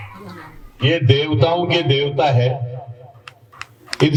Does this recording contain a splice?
no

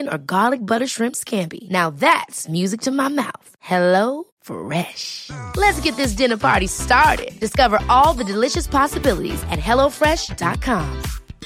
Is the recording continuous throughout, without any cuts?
yes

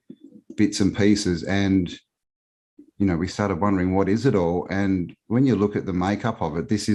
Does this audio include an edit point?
no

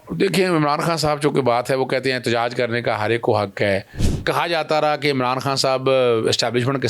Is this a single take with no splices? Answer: no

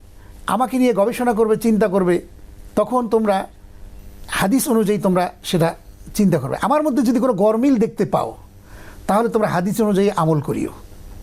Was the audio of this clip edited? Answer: no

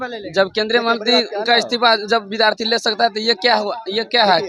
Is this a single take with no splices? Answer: yes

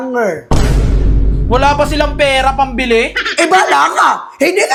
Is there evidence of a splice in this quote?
no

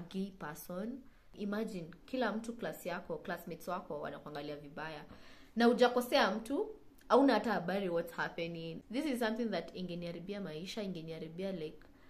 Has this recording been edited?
yes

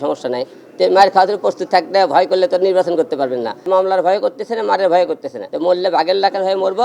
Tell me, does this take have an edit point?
yes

